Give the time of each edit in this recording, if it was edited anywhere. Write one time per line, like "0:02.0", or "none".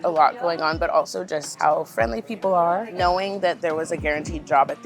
0:01.5
0:02.9

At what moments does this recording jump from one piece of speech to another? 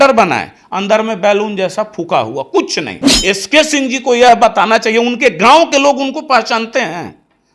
0:03.0

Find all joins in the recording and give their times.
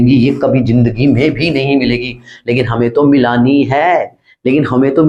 none

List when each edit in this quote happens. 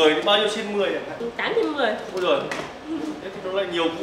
none

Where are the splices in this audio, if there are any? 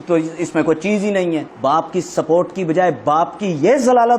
0:01.5

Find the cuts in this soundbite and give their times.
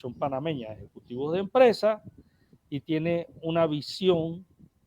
none

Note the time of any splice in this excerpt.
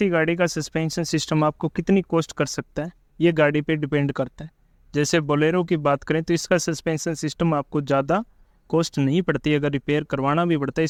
none

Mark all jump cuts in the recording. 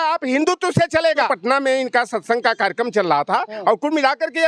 0:01.3

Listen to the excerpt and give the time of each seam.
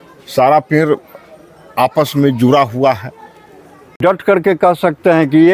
0:04.0

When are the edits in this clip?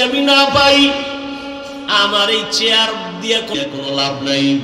0:03.6

